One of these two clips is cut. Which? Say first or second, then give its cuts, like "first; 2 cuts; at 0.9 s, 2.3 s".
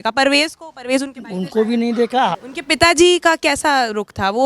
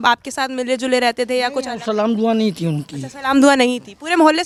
first; 1 cut; at 2.4 s